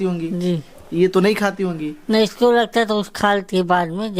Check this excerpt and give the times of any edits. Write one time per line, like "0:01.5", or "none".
none